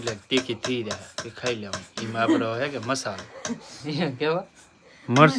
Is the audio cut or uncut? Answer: uncut